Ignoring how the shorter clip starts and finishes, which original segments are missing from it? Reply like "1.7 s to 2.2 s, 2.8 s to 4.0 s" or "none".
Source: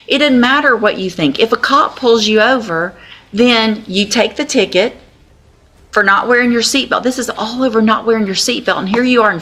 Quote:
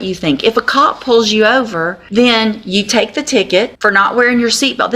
2.9 s to 3.2 s, 5.0 s to 5.9 s